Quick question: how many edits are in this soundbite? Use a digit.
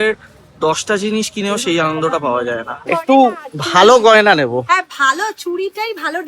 1